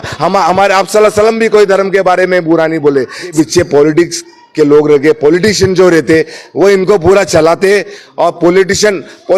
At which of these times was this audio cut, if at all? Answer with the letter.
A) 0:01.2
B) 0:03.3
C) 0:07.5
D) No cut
B